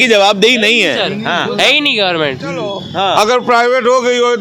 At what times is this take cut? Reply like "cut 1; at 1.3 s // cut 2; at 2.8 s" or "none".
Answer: cut 1; at 2.8 s

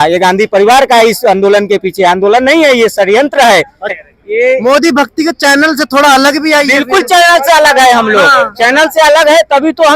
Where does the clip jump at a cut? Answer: cut 1; at 4.0 s

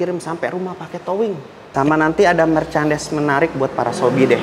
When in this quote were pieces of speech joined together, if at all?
cut 1; at 1.7 s

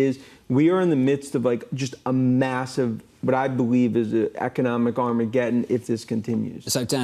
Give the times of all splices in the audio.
none

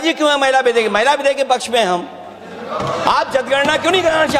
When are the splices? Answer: none

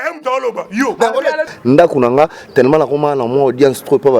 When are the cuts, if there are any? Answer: cut 1; at 1.5 s

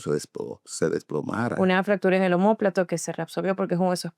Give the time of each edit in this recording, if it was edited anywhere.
cut 1; at 1.5 s

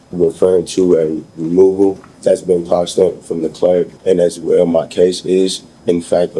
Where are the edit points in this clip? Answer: cut 1; at 2.1 s // cut 2; at 3.9 s

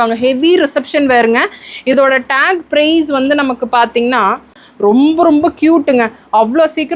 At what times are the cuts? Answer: cut 1; at 4.6 s

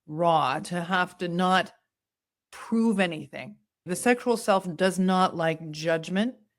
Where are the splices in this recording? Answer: cut 1; at 3.9 s

